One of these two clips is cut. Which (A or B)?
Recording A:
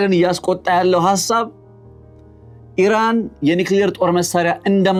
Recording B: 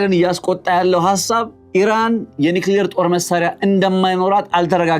B